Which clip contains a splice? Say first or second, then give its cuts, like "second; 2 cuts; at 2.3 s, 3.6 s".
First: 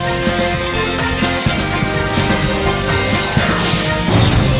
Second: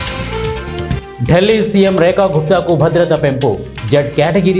second; 1 cut; at 1.0 s